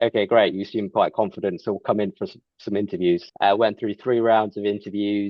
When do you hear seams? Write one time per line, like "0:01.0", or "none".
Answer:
0:03.3